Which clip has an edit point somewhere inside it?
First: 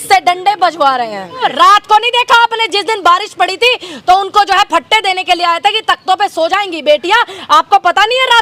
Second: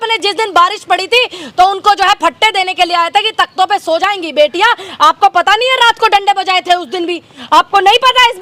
first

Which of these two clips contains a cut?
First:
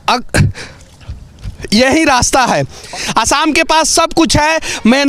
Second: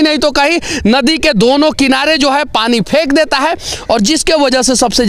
first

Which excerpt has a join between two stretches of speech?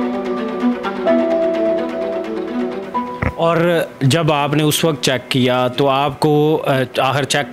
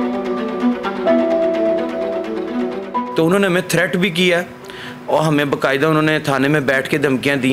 second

